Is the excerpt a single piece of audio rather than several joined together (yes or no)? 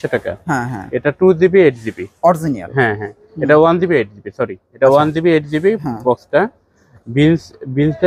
yes